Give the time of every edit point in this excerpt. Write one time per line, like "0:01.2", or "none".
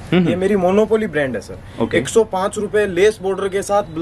none